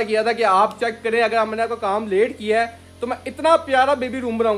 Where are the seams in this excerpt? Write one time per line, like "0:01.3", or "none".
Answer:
none